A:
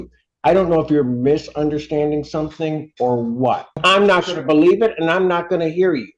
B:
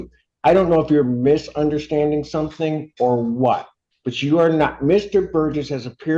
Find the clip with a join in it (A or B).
A